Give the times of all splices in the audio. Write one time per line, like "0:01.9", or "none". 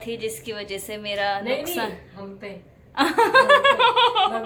none